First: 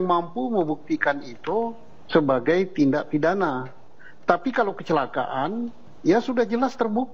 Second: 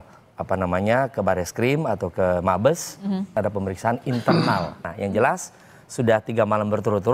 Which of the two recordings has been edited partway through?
second; 2 cuts; at 3.4 s, 4.9 s

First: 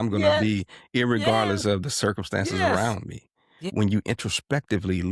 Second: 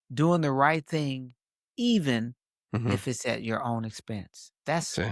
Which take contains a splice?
first; 1 cut; at 3.7 s

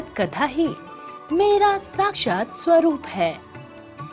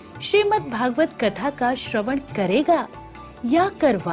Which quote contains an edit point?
first; 1 cut; at 2.2 s

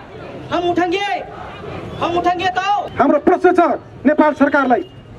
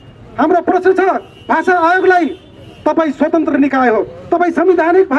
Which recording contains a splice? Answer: first; 1 cut; at 2.9 s

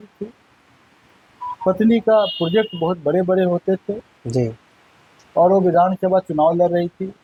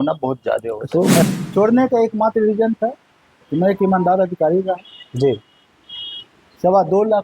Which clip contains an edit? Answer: second; 1 cut; at 1.2 s

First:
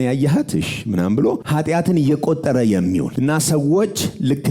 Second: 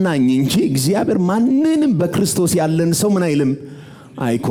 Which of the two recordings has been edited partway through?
first; 2 cuts; at 1.4 s, 3.1 s

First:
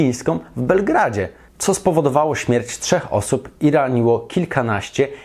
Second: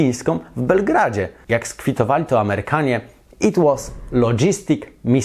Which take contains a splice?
second; 1 cut; at 1.3 s

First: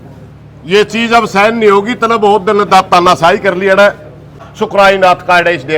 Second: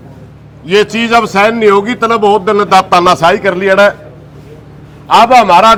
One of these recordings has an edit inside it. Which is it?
first; 1 cut; at 4.5 s

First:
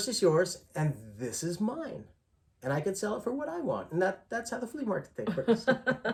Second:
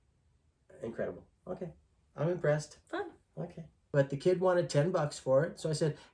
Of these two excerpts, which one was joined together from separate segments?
second; 1 cut; at 3.8 s

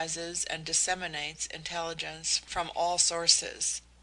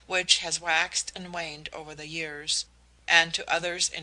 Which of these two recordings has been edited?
first; 1 cut; at 1.2 s

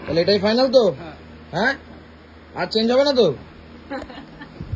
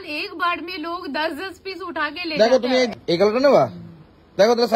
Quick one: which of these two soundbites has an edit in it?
second; 1 cut; at 2.9 s

